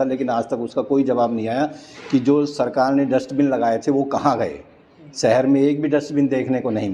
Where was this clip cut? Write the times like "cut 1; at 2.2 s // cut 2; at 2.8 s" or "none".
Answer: none